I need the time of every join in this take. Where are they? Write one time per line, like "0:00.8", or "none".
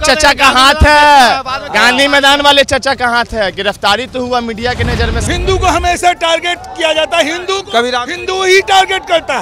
0:05.2